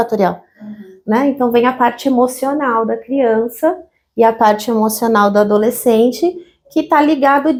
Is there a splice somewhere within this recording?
no; 0 cuts

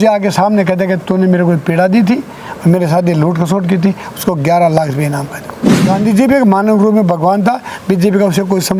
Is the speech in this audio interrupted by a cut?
yes; 1 cut; at 5.8 s

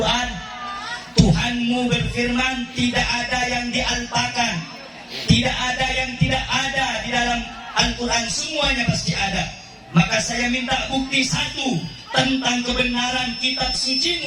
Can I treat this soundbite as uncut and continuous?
yes; 0 cuts

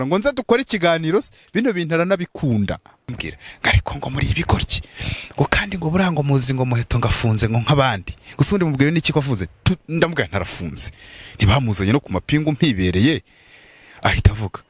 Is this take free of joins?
no; 1 cut; at 3.2 s

